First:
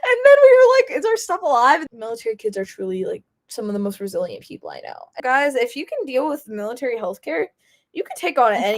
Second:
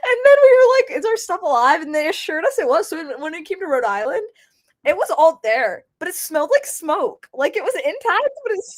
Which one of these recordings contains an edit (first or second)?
first